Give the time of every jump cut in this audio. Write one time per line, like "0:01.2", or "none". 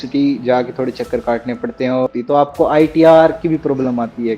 0:02.1